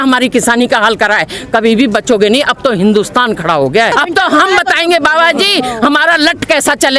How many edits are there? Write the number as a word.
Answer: one